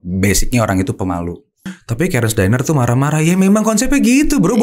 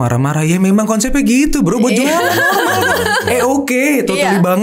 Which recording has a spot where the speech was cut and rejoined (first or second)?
first